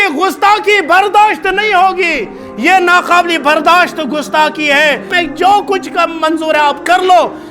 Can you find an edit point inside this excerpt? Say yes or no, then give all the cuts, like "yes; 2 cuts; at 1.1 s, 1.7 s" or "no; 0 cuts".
yes; 1 cut; at 5.1 s